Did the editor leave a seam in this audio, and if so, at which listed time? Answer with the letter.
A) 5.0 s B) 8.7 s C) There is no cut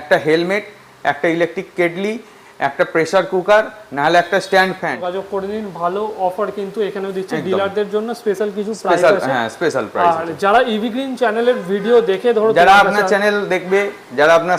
A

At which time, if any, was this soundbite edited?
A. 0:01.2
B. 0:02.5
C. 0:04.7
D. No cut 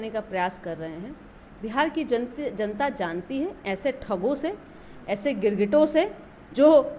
D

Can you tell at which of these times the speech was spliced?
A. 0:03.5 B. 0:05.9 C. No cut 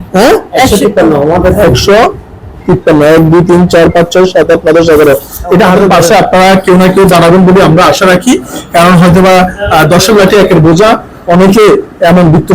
B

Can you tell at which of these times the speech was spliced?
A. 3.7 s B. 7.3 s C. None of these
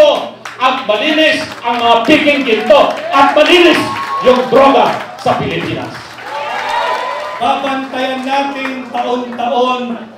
B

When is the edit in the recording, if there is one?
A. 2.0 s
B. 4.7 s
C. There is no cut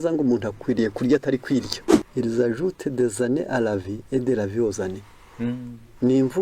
A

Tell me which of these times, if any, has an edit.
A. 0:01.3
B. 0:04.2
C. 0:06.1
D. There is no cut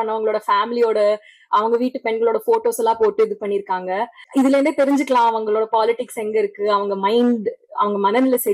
B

